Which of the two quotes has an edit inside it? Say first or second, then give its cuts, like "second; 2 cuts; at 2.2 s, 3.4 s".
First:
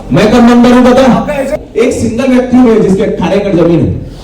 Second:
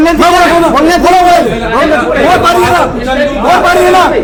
first; 1 cut; at 1.6 s